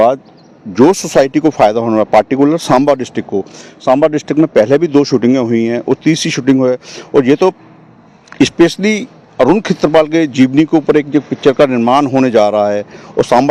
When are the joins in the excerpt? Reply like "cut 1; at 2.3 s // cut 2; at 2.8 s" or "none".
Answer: none